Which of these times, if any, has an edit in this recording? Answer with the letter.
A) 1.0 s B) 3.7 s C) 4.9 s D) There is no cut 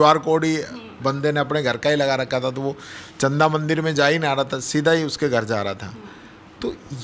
D